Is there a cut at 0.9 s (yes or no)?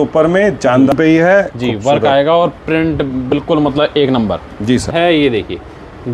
yes